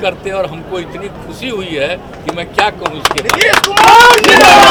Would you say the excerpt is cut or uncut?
uncut